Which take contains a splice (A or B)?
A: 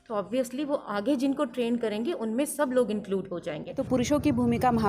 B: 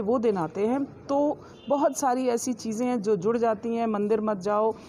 A